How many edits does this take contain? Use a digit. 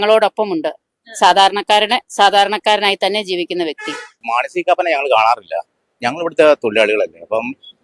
1